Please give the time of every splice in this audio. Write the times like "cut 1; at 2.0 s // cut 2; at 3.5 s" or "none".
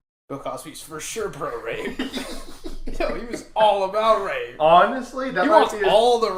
none